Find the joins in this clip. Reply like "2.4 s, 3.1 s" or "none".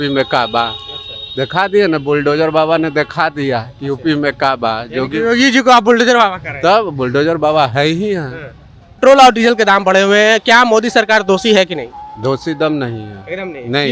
9.0 s